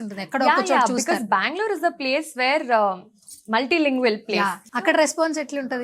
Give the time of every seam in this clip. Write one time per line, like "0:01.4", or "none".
0:04.6